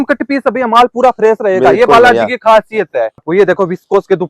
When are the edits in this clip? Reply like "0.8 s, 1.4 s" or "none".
3.2 s